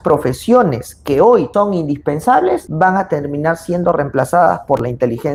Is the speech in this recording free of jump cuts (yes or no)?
yes